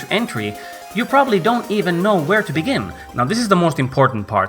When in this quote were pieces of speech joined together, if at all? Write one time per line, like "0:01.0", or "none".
0:03.0